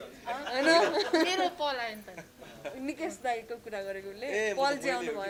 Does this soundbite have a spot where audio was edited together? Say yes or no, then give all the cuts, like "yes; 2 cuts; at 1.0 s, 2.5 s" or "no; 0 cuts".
no; 0 cuts